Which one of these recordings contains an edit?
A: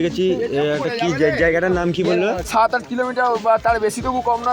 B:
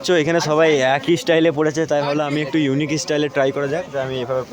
A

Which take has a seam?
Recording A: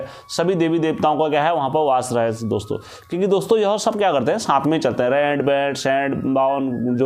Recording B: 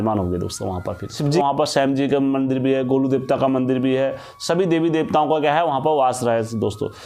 B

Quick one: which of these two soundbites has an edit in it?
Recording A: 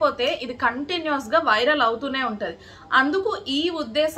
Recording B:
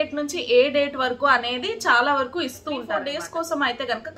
B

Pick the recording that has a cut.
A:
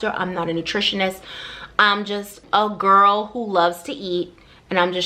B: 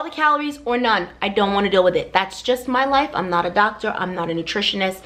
A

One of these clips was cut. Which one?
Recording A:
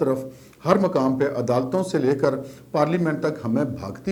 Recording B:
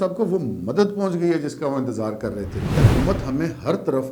B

